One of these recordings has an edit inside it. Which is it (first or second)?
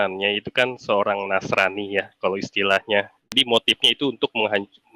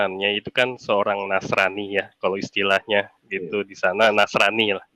first